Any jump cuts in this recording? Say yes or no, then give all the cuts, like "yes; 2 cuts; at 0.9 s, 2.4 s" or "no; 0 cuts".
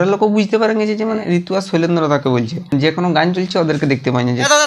yes; 1 cut; at 1.2 s